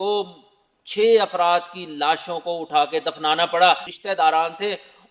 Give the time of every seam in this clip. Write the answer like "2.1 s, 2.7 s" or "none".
3.9 s